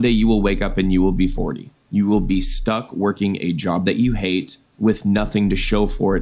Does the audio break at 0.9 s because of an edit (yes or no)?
no